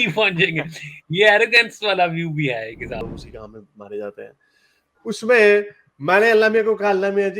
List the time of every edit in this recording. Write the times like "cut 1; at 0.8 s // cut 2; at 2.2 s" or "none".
cut 1; at 3.0 s